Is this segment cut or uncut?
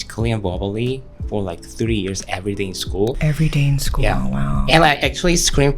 uncut